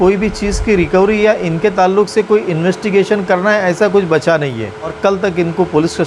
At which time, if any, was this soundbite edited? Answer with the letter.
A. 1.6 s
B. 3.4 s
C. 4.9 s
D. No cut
C